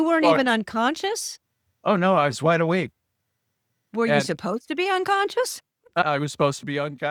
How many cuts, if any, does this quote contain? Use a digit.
0